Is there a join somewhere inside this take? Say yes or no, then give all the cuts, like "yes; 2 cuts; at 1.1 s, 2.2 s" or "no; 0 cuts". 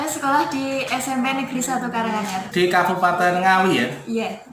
yes; 1 cut; at 2.4 s